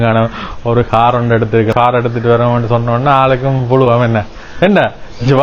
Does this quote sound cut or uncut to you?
cut